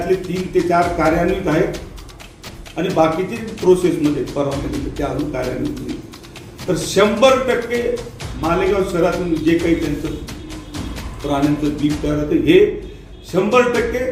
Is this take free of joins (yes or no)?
yes